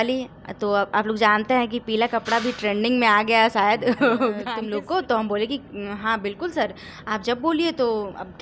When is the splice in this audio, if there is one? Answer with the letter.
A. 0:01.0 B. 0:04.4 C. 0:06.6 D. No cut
B